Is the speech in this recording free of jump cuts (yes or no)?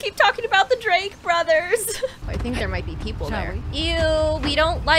no